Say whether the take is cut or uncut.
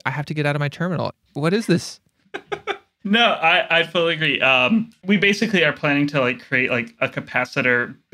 cut